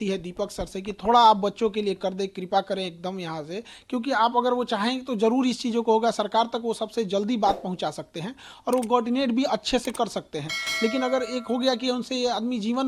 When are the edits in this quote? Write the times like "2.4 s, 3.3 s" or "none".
none